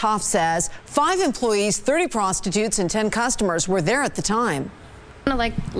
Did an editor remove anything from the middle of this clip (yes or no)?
no